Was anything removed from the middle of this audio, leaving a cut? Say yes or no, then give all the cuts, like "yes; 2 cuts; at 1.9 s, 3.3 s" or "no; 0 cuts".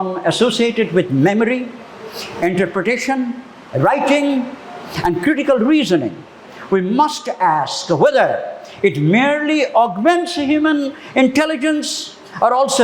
no; 0 cuts